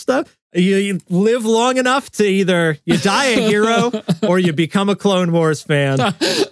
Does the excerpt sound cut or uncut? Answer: uncut